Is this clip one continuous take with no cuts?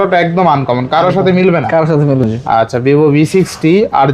no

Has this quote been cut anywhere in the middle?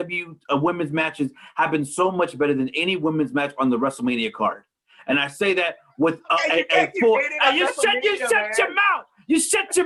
no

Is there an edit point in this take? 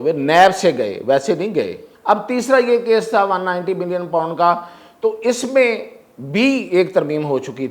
yes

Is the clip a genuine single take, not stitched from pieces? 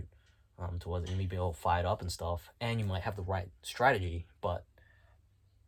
yes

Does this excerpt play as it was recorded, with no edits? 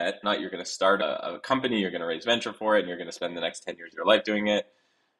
no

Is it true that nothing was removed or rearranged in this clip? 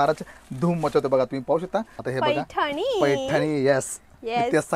no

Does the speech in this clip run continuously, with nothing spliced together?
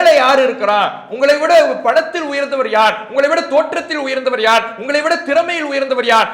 yes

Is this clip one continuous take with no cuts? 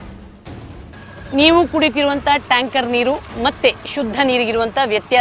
yes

